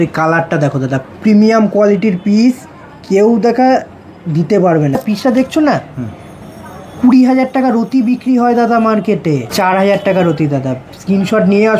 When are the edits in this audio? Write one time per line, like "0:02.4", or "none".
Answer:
0:05.0
0:09.5